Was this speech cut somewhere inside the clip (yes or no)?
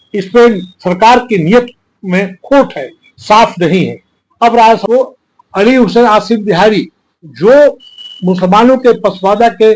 yes